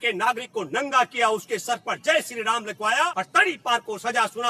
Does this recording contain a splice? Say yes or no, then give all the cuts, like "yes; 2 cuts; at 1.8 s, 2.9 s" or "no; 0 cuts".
yes; 1 cut; at 3.1 s